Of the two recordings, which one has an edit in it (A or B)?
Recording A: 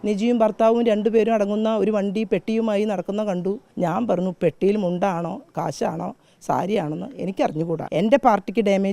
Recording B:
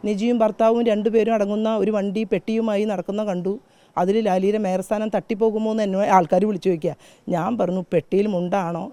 A